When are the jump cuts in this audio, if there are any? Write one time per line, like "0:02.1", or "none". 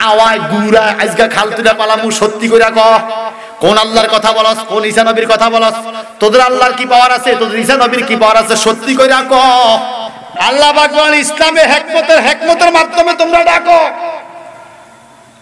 0:10.2